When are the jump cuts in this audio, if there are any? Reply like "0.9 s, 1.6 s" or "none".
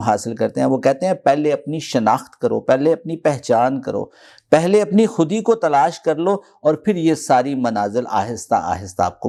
none